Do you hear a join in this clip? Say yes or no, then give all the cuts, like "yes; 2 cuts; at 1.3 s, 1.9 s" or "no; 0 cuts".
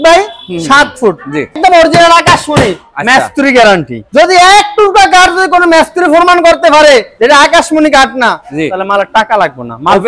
yes; 2 cuts; at 1.6 s, 7.1 s